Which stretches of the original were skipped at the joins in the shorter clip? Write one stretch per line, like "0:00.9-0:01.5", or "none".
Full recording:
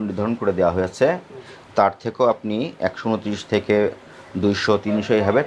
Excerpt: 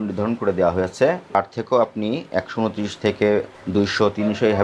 0:01.3-0:01.8
0:04.0-0:04.2